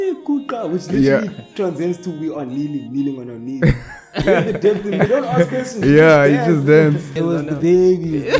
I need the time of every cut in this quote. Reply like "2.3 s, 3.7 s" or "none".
5.1 s, 7.1 s

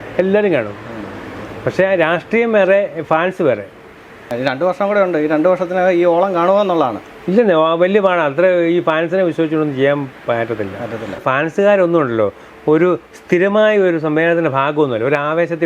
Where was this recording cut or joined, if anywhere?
4.2 s, 11.2 s

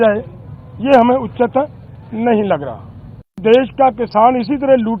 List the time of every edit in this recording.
3.4 s

